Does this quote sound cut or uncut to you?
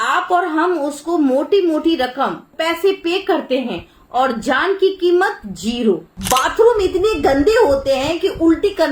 cut